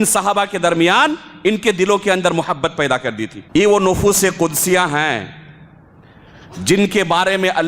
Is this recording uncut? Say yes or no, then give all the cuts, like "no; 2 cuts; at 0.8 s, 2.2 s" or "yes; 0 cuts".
no; 1 cut; at 3.3 s